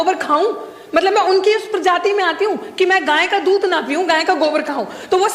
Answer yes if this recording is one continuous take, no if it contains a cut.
yes